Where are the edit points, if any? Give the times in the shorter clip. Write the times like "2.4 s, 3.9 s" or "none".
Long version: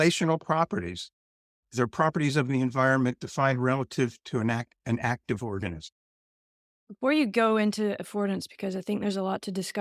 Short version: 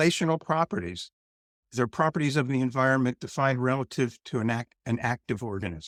none